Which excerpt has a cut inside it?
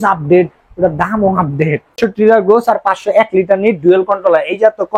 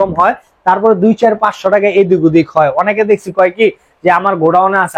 first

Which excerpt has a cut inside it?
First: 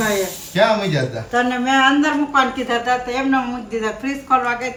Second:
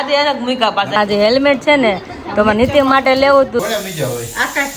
second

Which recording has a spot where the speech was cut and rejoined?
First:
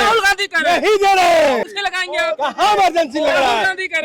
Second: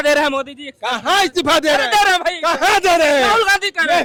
first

